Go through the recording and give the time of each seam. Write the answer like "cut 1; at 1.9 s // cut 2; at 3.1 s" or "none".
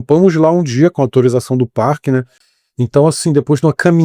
cut 1; at 2.4 s